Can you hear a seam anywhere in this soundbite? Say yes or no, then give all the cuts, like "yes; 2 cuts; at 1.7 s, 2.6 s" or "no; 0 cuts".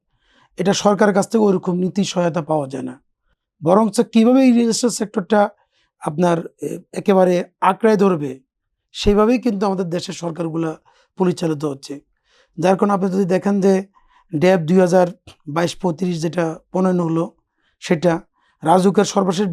no; 0 cuts